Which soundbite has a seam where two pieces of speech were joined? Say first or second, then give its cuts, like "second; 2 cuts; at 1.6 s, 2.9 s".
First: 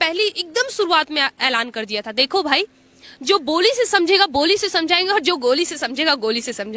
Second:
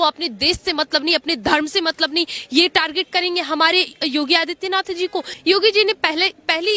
second; 1 cut; at 5.3 s